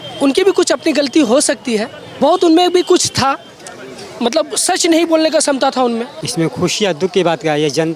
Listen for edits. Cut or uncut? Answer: cut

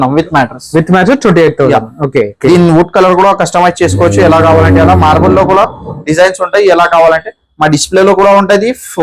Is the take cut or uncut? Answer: cut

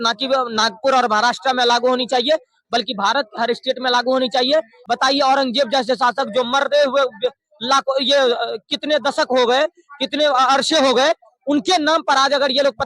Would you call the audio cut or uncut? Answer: cut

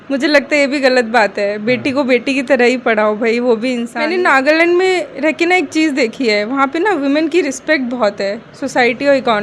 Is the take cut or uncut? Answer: cut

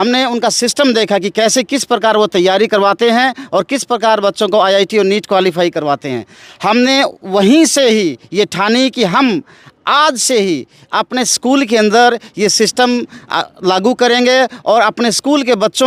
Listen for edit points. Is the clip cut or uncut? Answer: uncut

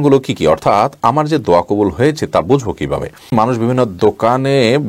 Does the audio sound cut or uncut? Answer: cut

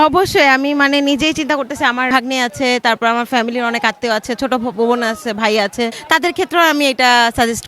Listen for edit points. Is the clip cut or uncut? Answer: cut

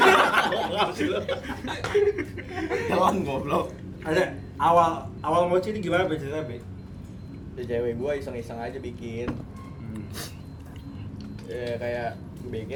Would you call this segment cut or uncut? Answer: uncut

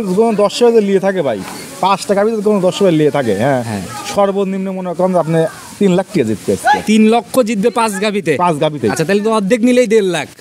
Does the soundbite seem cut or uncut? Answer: uncut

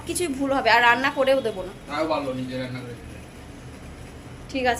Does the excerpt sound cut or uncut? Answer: uncut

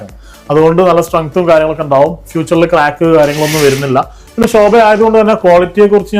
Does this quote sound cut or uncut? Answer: uncut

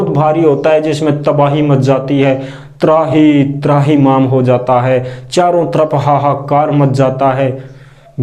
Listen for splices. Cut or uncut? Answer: uncut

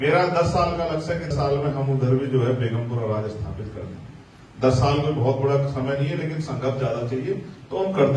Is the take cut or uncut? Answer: cut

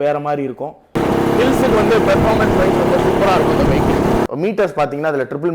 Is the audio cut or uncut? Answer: cut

